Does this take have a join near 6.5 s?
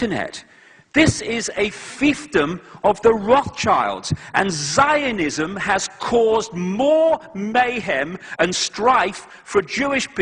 yes; 1 cut; at 6.5 s

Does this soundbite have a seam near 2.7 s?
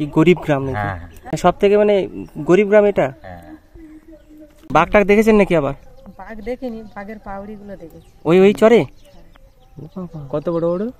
no; 2 cuts; at 1.4 s, 4.6 s

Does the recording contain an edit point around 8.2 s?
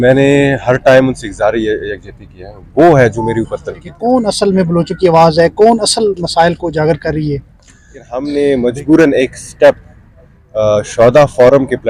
yes; 2 cuts; at 3.9 s, 8.2 s

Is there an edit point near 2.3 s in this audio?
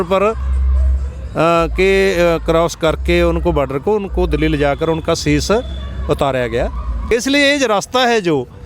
no; 1 cut; at 7.1 s

